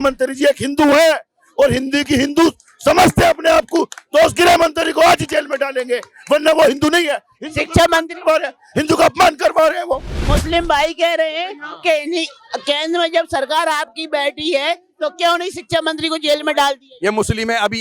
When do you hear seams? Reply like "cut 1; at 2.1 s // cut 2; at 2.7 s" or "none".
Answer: cut 1; at 10.1 s